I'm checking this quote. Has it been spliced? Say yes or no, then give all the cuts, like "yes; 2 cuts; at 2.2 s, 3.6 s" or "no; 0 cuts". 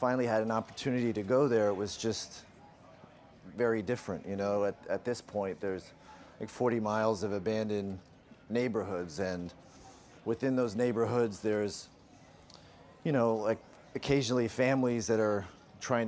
yes; 1 cut; at 7.2 s